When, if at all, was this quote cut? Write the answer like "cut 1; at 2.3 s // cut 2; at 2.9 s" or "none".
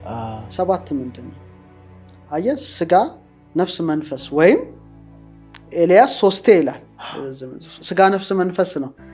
none